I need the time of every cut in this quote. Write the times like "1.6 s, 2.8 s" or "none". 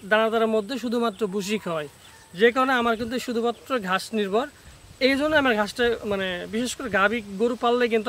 none